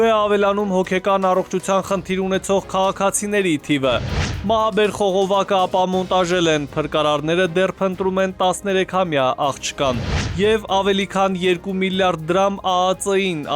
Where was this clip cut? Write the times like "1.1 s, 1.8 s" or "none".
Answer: 4.3 s